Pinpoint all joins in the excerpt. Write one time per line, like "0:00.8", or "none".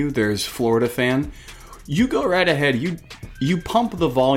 none